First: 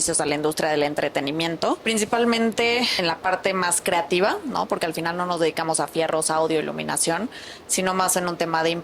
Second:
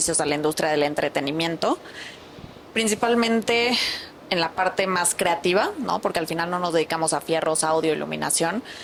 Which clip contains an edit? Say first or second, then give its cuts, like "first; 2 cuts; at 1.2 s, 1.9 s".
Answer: first; 2 cuts; at 1.8 s, 2.9 s